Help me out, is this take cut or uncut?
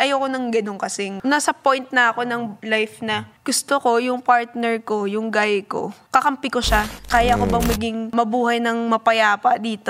cut